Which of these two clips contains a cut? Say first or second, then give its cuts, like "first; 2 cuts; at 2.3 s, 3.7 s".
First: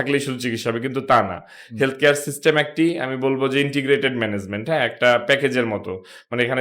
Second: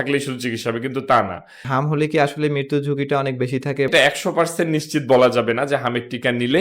second; 2 cuts; at 1.7 s, 3.9 s